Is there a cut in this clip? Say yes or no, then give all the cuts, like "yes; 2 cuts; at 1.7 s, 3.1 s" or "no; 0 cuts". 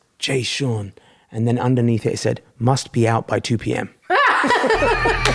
no; 0 cuts